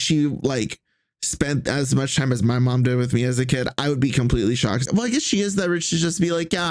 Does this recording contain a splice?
yes; 1 cut; at 4.8 s

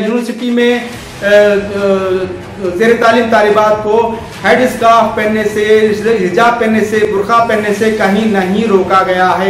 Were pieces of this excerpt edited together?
no; 0 cuts

